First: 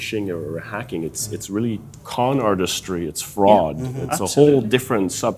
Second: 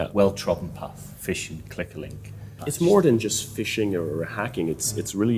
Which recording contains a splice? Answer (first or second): second